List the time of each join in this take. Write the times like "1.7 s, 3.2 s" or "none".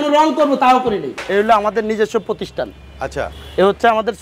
1.1 s